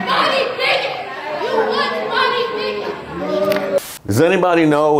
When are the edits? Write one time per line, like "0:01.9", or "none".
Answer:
0:01.1
0:03.8

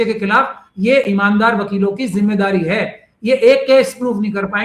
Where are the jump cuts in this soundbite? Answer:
none

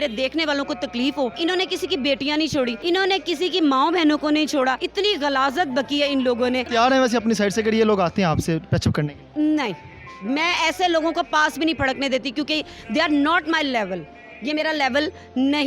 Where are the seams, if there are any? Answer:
0:01.4
0:02.8
0:04.8
0:06.7

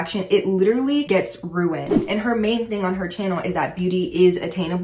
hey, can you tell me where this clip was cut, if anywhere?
0:02.1

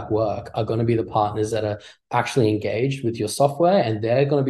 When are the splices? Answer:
none

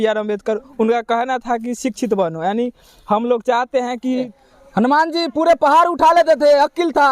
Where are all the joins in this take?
0:04.3

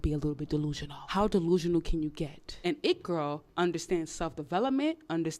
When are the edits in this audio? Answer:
0:00.9
0:02.5

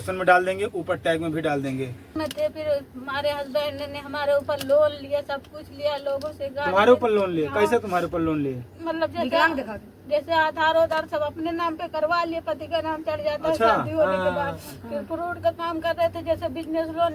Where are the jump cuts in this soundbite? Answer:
0:02.1

